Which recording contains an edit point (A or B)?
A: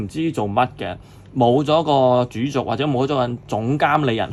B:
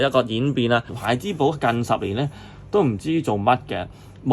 B